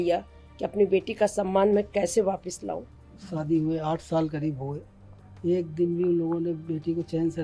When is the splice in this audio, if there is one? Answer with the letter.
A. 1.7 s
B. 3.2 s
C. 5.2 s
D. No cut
B